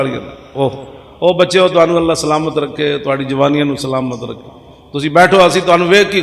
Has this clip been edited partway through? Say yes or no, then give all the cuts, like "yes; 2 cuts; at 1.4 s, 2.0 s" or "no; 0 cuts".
no; 0 cuts